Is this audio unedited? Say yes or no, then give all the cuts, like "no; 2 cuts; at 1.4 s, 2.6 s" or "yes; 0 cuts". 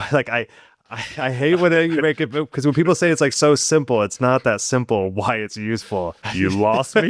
no; 1 cut; at 6.2 s